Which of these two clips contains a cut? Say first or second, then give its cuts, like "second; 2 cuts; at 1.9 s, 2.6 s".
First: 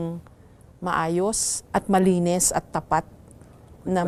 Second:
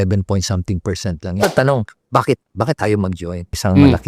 second; 1 cut; at 1.4 s